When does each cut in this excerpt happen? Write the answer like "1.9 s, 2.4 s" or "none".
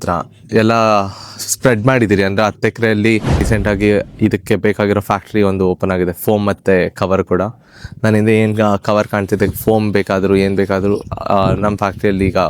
3.5 s